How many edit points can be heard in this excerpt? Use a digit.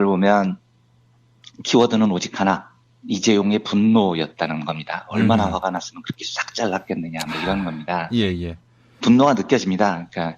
1